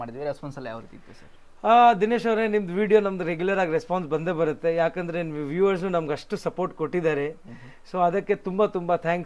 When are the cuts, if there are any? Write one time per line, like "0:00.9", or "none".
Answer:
none